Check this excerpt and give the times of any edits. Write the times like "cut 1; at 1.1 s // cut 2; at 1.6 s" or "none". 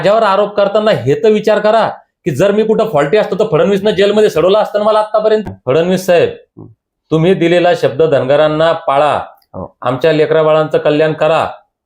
cut 1; at 5.4 s